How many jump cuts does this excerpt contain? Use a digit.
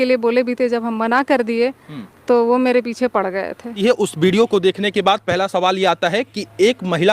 1